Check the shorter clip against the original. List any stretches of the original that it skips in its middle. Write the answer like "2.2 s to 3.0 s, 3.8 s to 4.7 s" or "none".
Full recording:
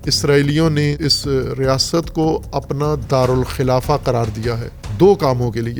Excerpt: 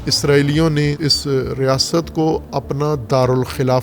none